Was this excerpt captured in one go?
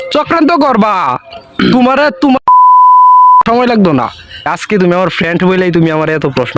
no; 1 cut; at 4.6 s

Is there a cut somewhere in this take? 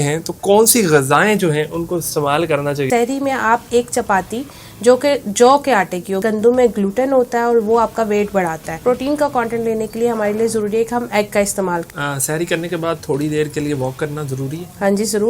yes; 4 cuts; at 2.9 s, 6.2 s, 8.7 s, 11.9 s

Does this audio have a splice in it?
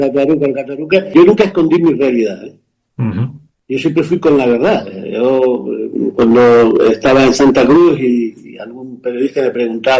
yes; 1 cut; at 1.1 s

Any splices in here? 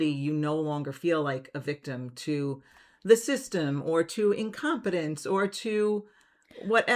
no; 0 cuts

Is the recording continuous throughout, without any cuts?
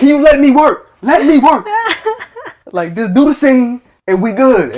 yes; 0 cuts

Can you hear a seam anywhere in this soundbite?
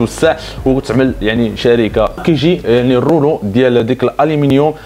yes; 1 cut; at 2.2 s

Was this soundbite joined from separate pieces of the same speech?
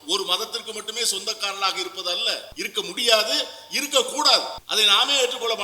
yes; 2 cuts; at 2.5 s, 4.6 s

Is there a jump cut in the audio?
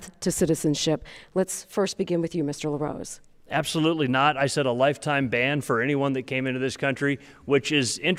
no; 0 cuts

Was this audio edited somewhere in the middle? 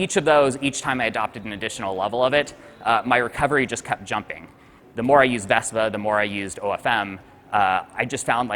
yes; 1 cut; at 4.7 s

